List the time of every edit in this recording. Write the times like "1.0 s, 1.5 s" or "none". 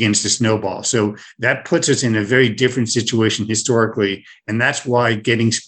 none